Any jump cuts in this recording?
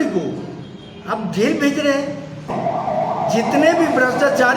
yes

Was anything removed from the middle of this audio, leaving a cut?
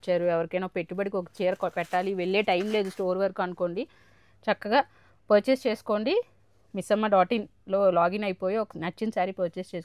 no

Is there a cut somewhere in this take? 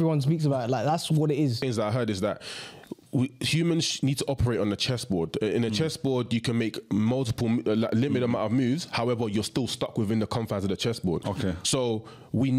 yes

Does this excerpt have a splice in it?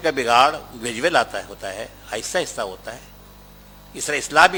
no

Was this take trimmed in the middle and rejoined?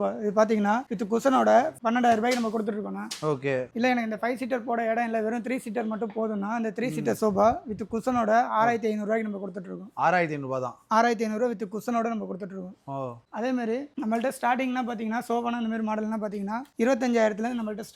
no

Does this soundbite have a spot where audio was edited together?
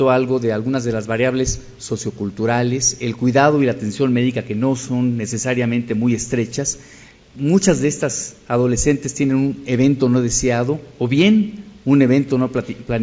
yes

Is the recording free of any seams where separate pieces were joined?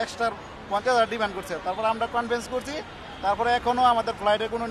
yes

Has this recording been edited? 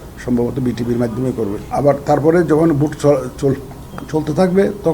yes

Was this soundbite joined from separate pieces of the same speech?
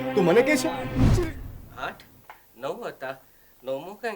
yes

